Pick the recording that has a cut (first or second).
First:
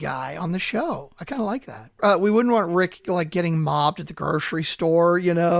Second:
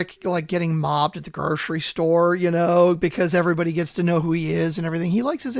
first